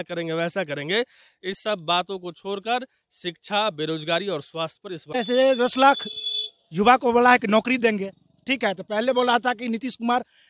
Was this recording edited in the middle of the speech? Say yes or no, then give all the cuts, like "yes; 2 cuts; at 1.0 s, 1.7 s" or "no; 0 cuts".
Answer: yes; 1 cut; at 5.2 s